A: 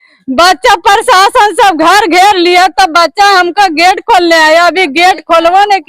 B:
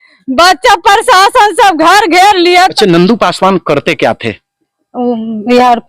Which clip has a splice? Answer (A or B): B